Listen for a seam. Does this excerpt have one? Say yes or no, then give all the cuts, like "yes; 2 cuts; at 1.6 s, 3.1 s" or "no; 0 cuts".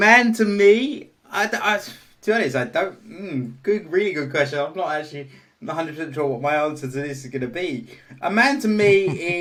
no; 0 cuts